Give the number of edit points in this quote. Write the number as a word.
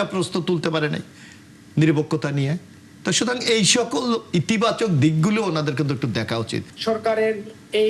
one